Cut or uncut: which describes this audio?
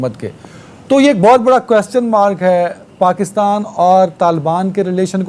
uncut